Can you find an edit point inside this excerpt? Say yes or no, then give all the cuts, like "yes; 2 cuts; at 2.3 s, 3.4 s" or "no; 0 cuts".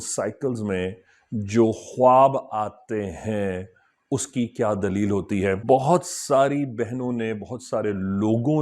yes; 1 cut; at 5.6 s